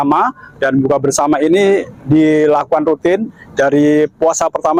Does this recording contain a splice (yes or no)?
no